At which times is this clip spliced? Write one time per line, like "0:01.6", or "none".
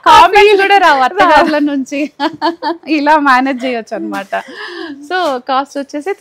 none